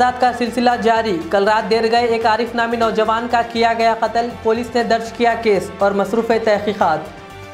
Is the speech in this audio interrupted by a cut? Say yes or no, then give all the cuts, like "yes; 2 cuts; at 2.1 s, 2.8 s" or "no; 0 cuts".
no; 0 cuts